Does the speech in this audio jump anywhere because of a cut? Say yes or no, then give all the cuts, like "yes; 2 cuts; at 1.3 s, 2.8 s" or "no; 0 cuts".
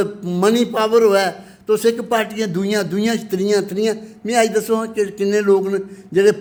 no; 0 cuts